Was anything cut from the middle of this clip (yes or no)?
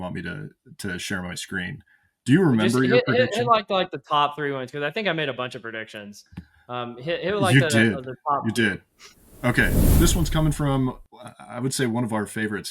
yes